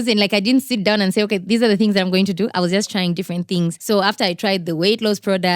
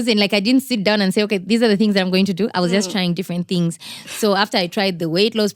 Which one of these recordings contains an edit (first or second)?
first